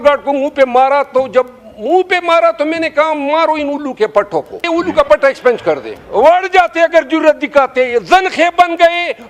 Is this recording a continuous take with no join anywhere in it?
no; 2 cuts; at 4.6 s, 5.9 s

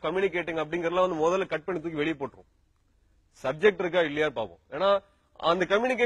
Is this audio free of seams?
yes; 0 cuts

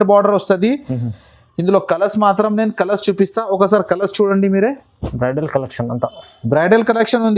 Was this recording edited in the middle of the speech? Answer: no; 0 cuts

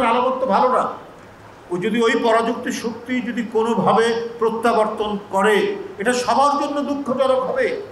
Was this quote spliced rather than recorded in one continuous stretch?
no; 0 cuts

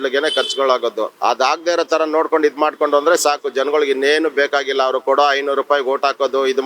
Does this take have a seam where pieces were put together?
yes; 1 cut; at 1.1 s

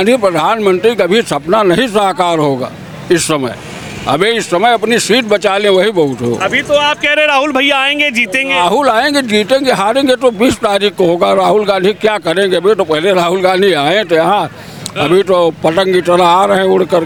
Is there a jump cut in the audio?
no; 0 cuts

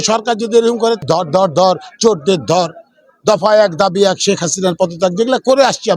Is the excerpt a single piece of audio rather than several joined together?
no; 1 cut; at 1.0 s

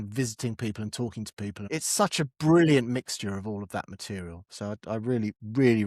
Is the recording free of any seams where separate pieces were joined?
no; 1 cut; at 1.6 s

